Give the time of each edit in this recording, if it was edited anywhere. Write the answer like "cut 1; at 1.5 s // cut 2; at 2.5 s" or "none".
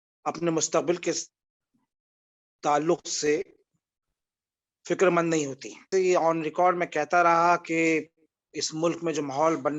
cut 1; at 5.9 s